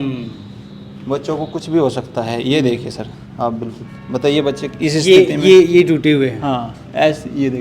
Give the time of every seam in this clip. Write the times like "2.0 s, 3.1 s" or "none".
none